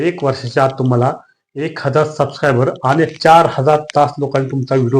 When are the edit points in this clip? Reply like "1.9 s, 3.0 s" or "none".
none